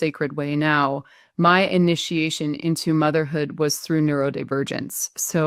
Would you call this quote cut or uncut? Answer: uncut